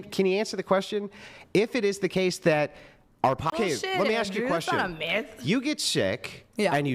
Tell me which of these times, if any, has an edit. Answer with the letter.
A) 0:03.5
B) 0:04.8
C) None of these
A